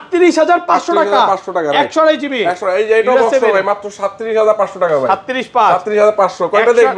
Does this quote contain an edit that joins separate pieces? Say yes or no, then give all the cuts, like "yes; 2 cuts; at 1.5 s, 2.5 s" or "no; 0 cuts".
no; 0 cuts